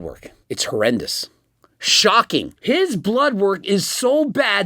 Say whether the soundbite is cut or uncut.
cut